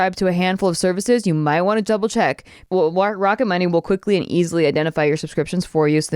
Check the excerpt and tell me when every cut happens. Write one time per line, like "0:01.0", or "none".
0:02.6